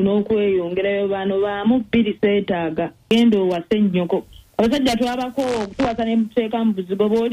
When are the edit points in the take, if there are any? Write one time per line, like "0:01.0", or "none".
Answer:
0:03.1